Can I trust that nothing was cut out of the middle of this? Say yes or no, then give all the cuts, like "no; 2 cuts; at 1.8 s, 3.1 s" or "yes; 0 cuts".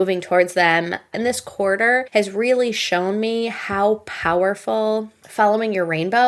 no; 3 cuts; at 1.1 s, 2.1 s, 5.2 s